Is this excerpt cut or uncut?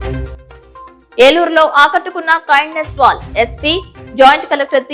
cut